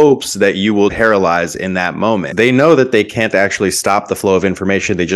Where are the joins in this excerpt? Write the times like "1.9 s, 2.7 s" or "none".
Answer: 0.9 s, 2.3 s